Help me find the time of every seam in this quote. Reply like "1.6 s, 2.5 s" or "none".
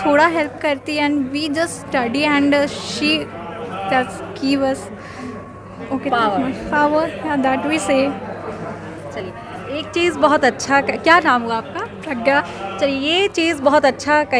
none